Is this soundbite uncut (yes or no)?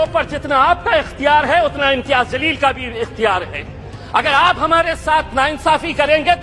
yes